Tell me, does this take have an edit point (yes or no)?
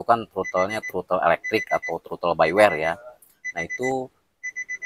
no